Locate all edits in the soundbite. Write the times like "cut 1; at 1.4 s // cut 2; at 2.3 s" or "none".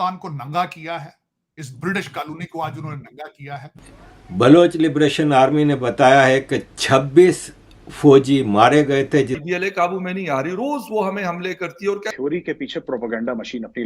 cut 1; at 3.8 s // cut 2; at 9.4 s // cut 3; at 12.1 s